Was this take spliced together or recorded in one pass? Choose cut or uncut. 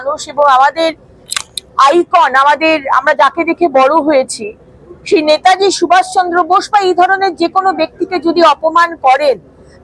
uncut